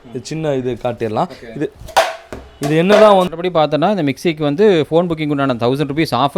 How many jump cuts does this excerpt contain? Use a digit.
1